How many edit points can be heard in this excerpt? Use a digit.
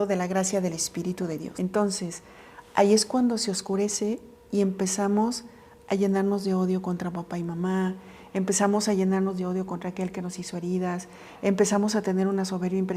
1